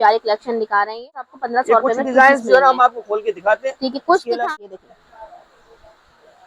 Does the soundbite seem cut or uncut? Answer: cut